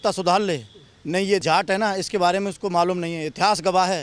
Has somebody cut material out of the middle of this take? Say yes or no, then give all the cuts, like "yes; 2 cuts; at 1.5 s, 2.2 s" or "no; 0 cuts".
yes; 1 cut; at 1.4 s